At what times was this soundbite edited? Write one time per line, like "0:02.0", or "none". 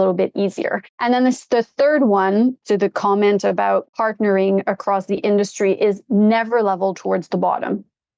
0:00.9
0:02.6
0:03.9